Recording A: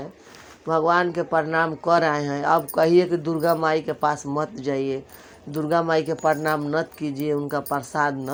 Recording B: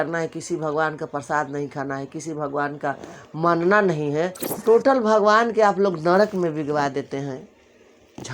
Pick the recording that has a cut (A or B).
B